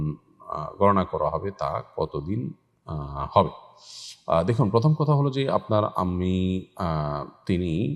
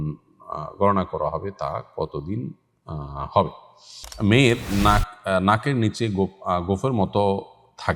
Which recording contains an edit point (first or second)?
second